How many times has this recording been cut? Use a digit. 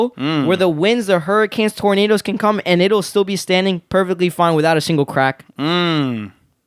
0